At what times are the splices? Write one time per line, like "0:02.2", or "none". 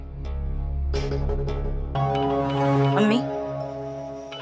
0:02.0